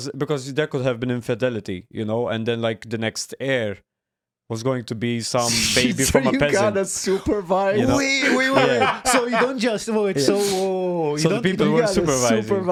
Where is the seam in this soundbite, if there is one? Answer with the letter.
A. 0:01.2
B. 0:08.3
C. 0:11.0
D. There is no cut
D